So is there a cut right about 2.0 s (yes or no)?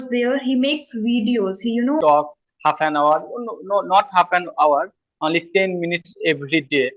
yes